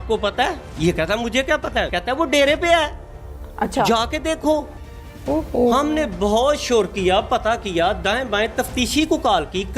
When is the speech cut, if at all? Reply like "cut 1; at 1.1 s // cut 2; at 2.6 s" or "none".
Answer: cut 1; at 1.9 s